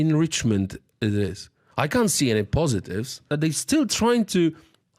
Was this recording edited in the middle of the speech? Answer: yes; 1 cut; at 3.2 s

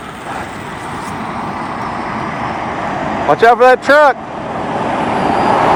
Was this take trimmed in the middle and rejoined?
no; 0 cuts

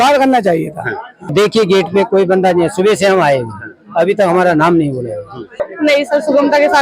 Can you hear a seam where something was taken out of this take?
yes; 2 cuts; at 1.3 s, 5.6 s

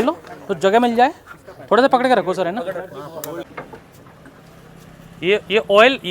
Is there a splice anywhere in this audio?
yes; 1 cut; at 3.5 s

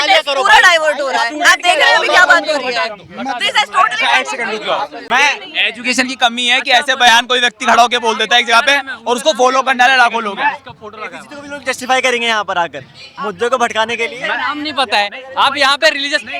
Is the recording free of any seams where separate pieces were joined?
no; 1 cut; at 5.0 s

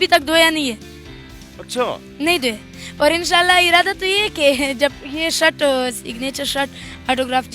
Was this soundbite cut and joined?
no; 0 cuts

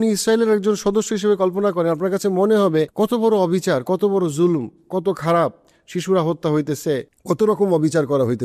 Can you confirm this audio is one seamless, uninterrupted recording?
no; 2 cuts; at 2.9 s, 7.1 s

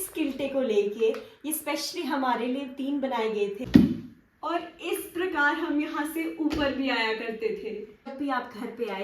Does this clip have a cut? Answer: yes; 2 cuts; at 3.6 s, 8.1 s

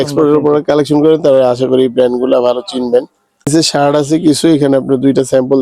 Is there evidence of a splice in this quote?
yes; 1 cut; at 3.5 s

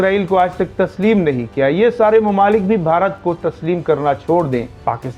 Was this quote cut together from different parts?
no; 0 cuts

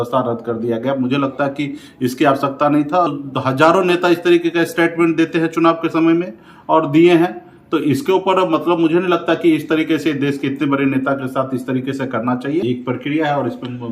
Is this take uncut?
no; 2 cuts; at 3.1 s, 12.6 s

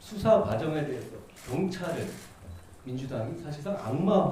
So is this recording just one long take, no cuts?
no; 1 cut; at 1.3 s

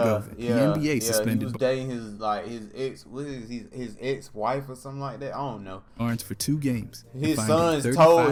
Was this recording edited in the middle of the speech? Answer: no; 0 cuts

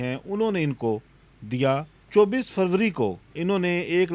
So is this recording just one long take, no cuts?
no; 2 cuts; at 2.0 s, 3.3 s

